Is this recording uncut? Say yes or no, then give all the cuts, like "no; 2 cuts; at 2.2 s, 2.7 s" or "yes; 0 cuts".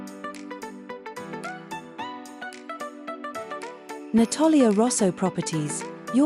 yes; 0 cuts